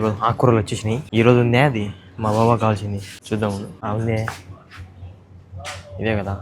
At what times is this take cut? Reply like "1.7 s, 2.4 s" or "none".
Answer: 1.0 s, 3.1 s, 3.7 s